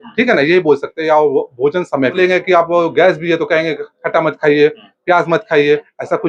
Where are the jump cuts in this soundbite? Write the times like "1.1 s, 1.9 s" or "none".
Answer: 2.2 s